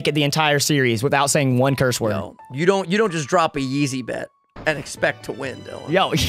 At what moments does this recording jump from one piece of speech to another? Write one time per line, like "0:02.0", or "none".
none